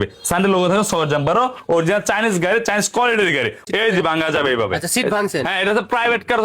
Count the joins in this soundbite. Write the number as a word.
one